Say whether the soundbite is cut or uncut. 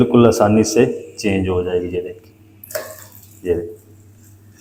uncut